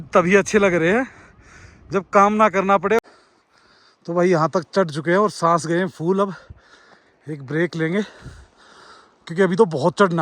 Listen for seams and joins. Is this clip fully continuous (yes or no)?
no